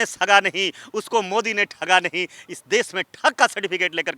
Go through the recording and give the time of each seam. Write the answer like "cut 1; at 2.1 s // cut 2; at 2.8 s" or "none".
none